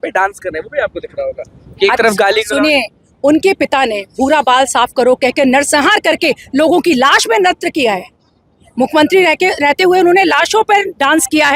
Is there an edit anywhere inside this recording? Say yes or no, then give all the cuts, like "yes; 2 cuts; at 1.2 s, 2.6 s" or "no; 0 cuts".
no; 0 cuts